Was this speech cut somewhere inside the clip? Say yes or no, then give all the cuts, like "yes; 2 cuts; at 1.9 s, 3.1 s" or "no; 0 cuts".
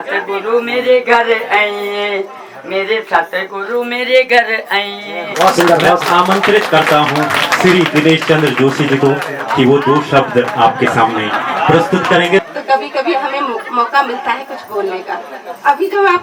yes; 2 cuts; at 5.3 s, 12.4 s